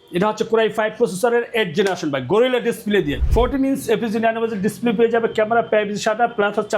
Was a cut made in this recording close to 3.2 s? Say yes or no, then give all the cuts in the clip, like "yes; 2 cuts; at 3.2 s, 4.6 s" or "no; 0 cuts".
yes; 1 cut; at 3.2 s